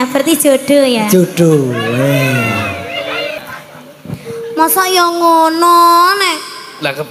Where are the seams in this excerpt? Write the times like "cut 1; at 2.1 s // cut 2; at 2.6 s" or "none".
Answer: cut 1; at 3.4 s